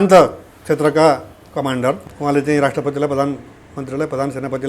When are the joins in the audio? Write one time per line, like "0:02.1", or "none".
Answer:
0:02.1